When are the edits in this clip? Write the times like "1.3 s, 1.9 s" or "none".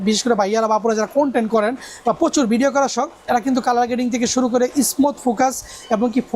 none